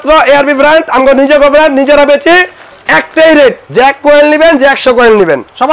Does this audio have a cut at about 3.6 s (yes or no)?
yes